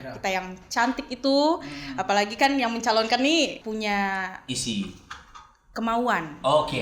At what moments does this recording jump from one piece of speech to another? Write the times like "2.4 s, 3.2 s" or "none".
3.6 s